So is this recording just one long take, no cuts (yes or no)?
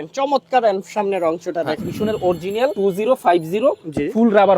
no